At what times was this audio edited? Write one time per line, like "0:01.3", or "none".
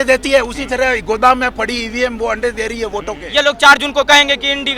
0:03.2